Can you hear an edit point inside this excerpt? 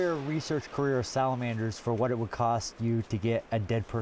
no; 0 cuts

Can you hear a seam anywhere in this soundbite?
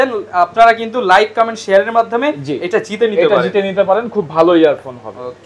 no; 0 cuts

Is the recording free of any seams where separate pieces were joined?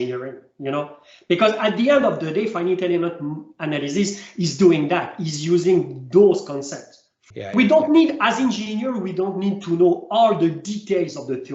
no; 1 cut; at 7.2 s

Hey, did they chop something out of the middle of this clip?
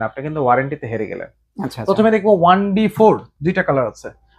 no; 0 cuts

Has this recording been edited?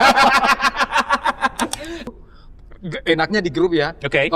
yes; 1 cut; at 2.1 s

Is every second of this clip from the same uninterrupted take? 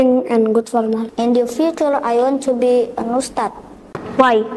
no; 1 cut; at 1.1 s

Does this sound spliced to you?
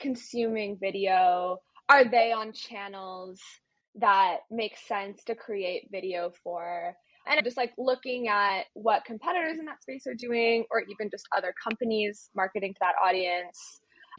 no; 0 cuts

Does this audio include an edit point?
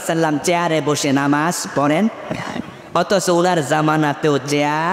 no; 0 cuts

